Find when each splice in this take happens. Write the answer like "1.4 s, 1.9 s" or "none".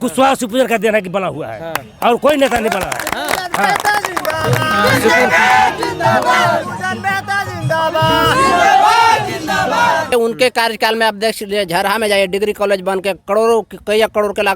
10.1 s